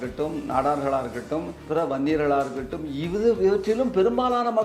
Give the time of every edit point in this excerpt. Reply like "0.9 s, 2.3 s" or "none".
1.6 s

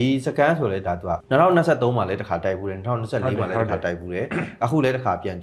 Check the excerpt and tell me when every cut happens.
1.2 s

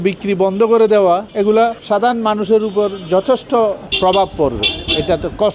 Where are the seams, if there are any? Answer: 1.4 s, 3.9 s

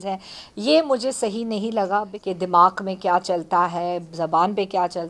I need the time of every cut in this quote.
2.1 s

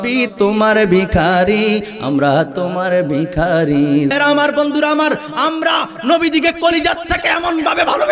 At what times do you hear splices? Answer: 4.1 s

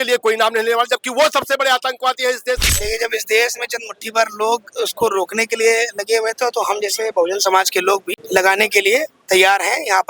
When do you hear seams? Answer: 2.6 s, 8.1 s

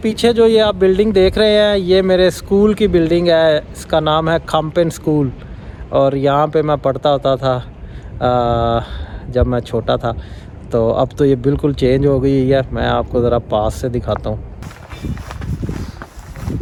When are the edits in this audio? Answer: none

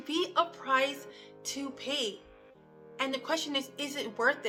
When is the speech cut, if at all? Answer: none

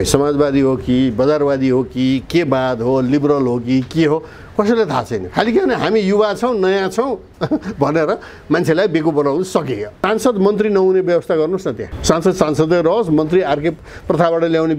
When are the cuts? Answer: 9.9 s

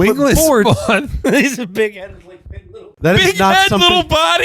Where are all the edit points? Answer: 2.9 s

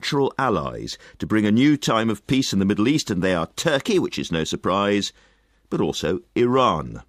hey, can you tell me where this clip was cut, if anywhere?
none

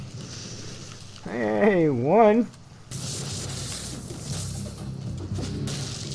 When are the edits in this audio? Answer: 2.9 s

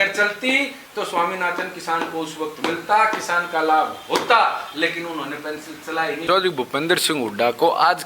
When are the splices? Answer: 6.2 s

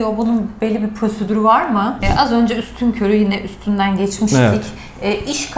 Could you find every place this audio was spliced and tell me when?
2.0 s

